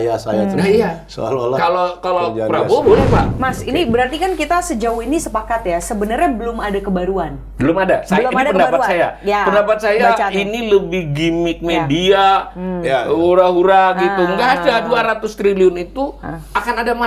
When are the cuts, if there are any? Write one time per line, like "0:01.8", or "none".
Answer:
0:03.3